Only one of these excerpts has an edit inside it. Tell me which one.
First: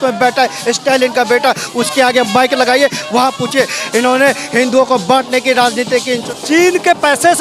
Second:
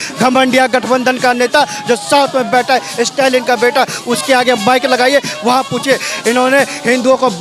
first; 1 cut; at 6.3 s

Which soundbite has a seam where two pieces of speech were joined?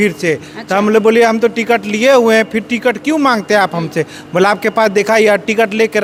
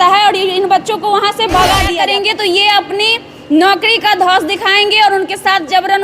second; 1 cut; at 1.9 s

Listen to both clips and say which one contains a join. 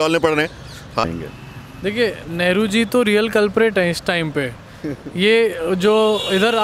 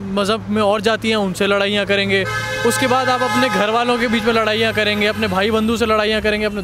first; 1 cut; at 1.0 s

